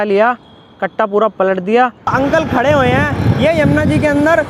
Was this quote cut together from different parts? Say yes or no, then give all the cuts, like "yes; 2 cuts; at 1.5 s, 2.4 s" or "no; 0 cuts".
yes; 1 cut; at 2.1 s